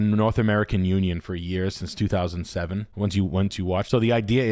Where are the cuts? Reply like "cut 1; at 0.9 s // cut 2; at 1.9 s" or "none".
none